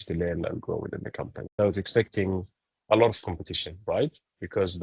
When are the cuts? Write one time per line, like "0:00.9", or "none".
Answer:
0:01.6